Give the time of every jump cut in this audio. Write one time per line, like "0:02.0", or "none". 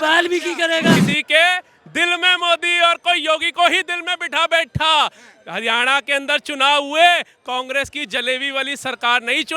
0:01.1

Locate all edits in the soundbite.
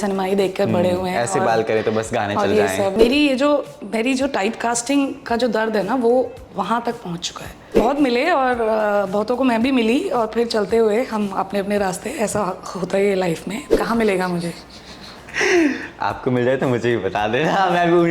0:02.9
0:07.8
0:13.6

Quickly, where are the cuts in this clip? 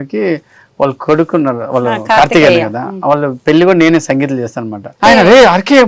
0:05.0

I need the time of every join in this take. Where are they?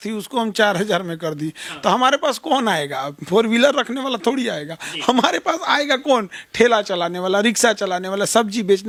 none

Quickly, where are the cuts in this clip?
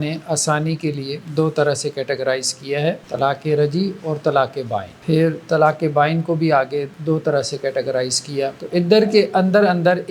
0:01.1
0:03.0
0:04.9
0:06.9
0:08.6

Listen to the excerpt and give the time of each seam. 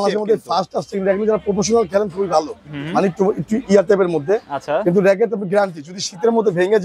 none

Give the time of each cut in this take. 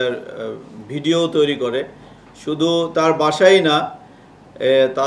none

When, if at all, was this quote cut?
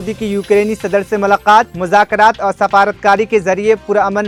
none

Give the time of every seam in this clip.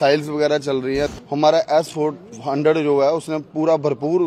0:01.1

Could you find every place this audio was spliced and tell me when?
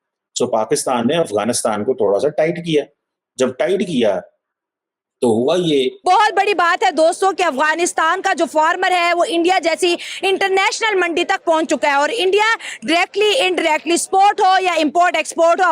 0:06.0

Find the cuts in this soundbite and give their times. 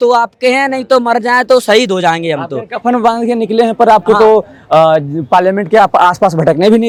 none

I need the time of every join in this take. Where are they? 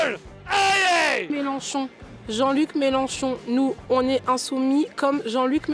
0:01.3

